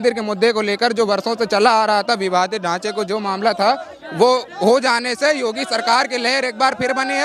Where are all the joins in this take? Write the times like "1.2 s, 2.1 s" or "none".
none